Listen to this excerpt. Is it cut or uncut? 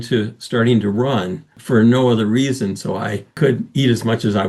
cut